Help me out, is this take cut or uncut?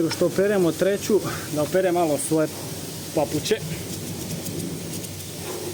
uncut